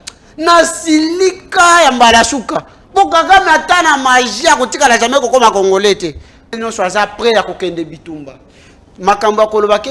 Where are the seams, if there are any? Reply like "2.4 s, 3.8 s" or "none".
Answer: 6.6 s